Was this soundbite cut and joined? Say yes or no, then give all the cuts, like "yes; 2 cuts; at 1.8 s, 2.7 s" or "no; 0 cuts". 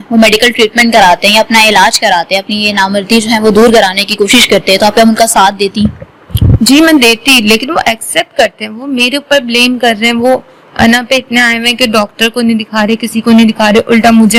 no; 0 cuts